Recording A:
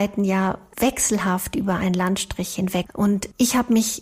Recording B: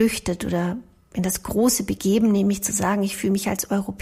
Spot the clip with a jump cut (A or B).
A